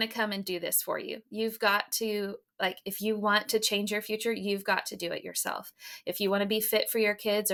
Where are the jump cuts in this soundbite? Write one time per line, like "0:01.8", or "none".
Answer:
none